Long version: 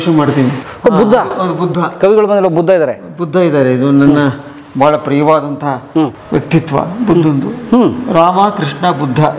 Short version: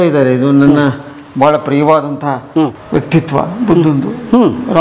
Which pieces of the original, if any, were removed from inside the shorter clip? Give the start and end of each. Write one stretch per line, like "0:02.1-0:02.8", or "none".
none